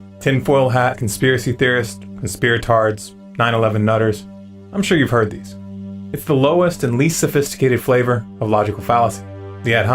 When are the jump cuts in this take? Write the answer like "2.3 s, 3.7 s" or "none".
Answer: 1.1 s